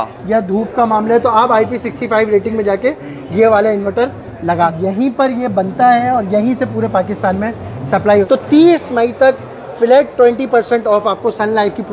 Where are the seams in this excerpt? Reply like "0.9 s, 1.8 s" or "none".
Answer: 4.8 s, 8.3 s